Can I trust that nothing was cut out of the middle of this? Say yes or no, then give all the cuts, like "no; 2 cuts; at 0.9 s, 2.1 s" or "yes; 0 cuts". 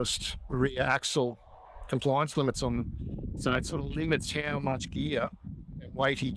yes; 0 cuts